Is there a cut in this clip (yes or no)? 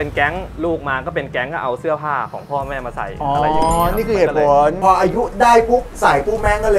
no